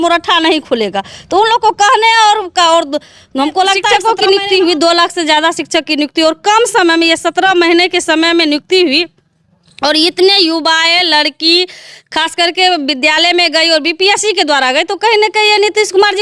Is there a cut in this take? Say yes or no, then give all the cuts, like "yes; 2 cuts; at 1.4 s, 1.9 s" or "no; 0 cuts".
yes; 1 cut; at 3.8 s